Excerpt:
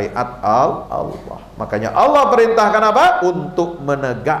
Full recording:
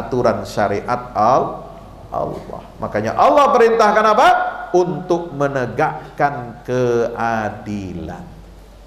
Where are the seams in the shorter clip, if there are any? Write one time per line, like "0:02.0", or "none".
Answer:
0:00.9
0:03.2